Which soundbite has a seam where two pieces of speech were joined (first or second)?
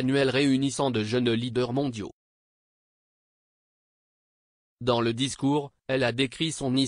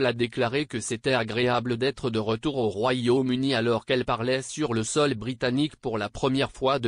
second